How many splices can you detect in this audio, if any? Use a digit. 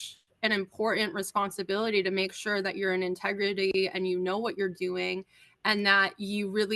0